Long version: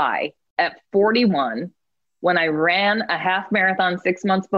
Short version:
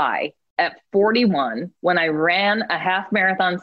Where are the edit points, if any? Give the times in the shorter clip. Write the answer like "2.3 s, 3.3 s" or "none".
1.6 s